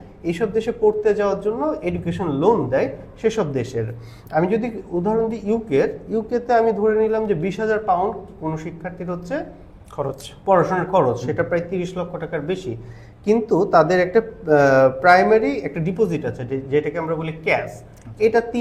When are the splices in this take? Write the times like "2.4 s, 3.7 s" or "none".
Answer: none